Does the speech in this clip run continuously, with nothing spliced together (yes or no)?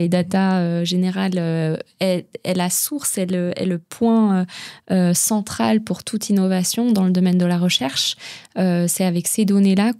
yes